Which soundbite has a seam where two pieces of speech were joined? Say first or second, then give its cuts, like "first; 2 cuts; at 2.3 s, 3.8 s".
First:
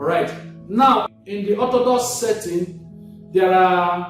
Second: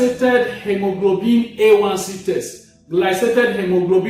first; 1 cut; at 1.1 s